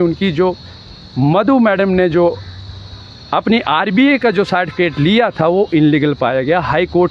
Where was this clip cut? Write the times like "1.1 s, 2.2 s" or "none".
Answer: none